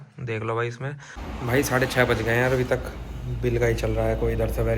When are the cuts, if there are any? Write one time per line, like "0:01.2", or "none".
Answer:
0:01.1